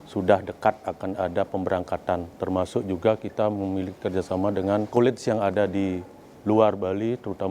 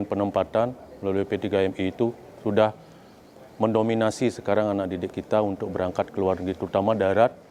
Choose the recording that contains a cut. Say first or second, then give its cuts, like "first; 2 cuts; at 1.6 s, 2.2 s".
first; 1 cut; at 4.9 s